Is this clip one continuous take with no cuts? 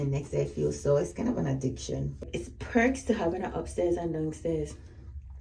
no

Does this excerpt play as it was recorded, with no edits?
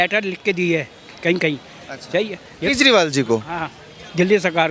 yes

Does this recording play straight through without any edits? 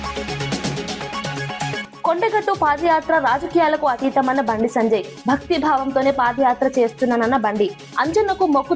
no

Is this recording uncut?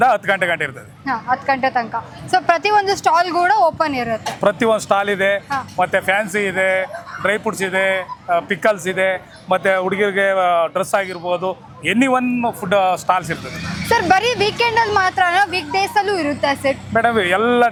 yes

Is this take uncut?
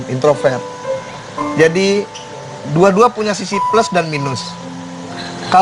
yes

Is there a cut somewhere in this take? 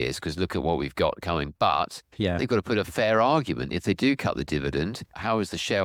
no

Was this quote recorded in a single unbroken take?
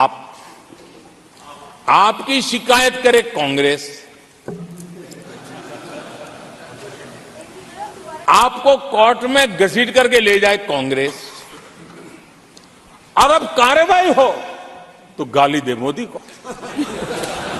yes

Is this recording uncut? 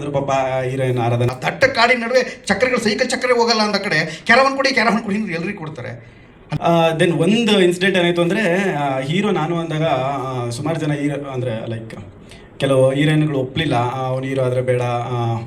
no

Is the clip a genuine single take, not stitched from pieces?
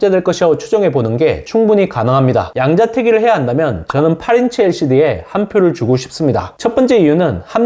no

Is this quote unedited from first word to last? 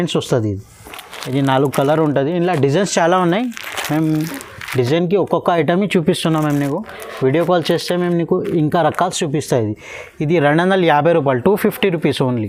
yes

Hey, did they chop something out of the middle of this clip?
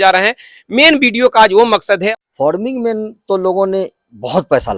yes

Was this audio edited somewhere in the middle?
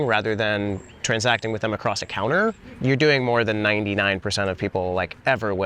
yes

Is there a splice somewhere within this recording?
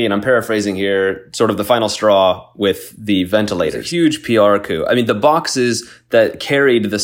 yes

